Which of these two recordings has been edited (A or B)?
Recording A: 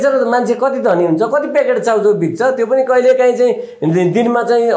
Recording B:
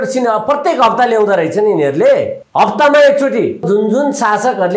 B